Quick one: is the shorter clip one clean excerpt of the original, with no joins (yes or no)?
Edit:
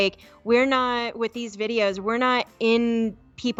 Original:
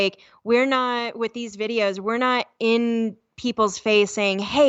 yes